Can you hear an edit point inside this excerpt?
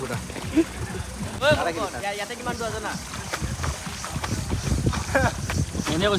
yes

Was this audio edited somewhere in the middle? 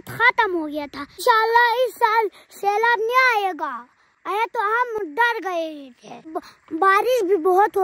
yes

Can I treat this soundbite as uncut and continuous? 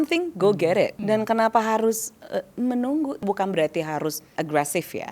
no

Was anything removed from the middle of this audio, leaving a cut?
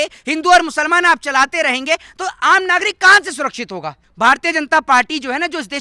yes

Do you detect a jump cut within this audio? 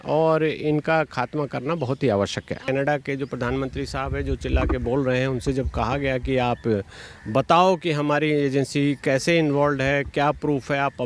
yes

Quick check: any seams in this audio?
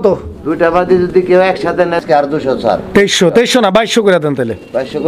yes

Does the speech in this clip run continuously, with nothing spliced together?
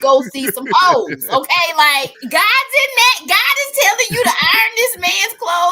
no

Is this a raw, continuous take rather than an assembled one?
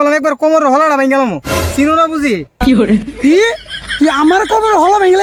yes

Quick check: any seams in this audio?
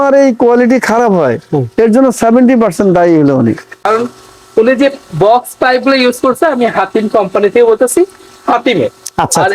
yes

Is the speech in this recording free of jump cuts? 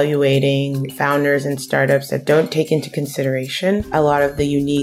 no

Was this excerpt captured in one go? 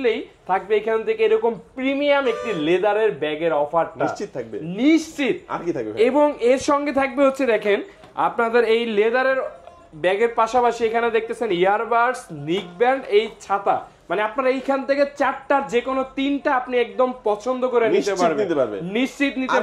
yes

